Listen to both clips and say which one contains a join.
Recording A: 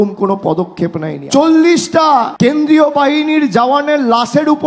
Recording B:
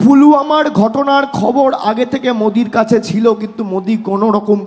A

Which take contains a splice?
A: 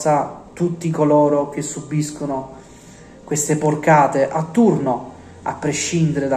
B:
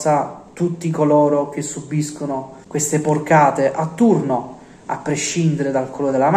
B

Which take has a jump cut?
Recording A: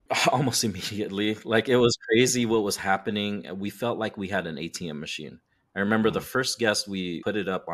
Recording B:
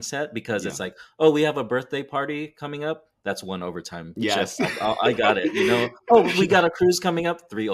B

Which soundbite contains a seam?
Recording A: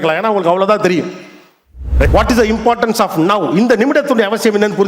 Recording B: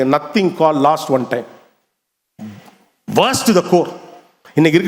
A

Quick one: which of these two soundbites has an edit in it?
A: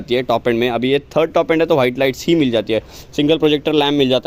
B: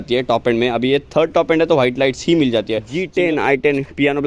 B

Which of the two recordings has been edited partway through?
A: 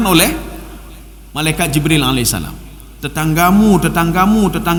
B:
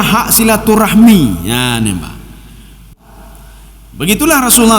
B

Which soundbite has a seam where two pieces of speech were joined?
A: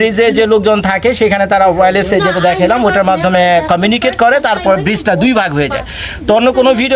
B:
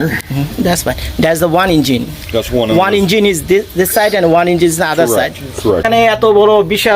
B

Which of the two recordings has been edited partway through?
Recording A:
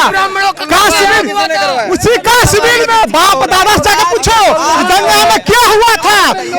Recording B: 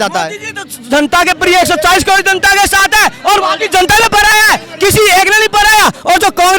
A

